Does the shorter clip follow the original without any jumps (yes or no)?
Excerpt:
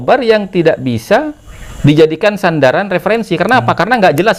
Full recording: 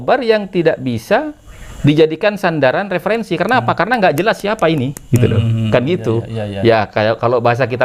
yes